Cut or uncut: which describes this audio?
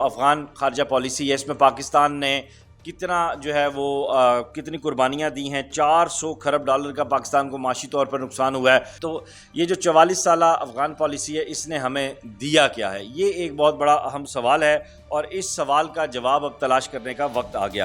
cut